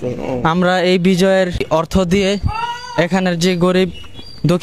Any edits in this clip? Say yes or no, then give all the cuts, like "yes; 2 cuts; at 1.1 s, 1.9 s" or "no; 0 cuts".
yes; 1 cut; at 1.6 s